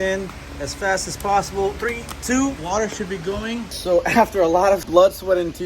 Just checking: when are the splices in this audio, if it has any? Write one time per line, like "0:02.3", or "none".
0:02.6
0:03.8
0:04.8